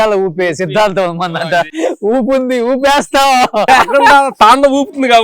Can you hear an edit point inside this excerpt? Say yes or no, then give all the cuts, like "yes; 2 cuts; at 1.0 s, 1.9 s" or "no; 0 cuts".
yes; 2 cuts; at 1.7 s, 3.6 s